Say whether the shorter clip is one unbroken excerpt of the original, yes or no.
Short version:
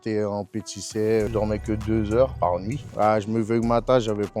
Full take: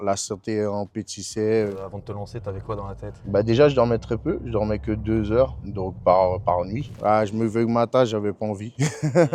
no